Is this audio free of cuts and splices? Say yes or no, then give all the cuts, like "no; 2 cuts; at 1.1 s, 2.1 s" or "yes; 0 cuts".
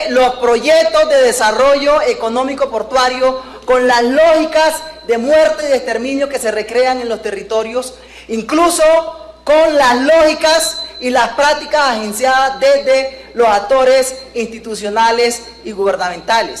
no; 1 cut; at 1.8 s